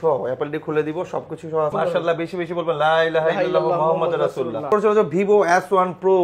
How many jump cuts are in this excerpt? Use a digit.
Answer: 2